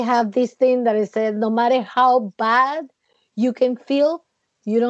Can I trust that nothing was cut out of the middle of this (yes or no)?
yes